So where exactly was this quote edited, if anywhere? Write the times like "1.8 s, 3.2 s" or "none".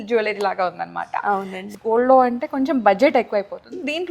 1.6 s